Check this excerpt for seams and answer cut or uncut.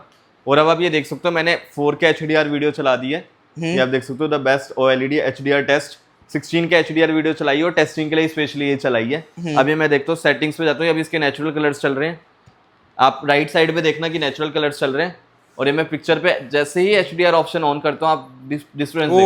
uncut